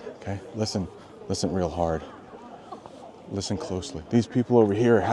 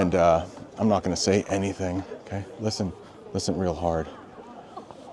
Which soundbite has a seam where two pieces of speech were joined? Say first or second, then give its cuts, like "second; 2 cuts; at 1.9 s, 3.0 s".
first; 1 cut; at 4.0 s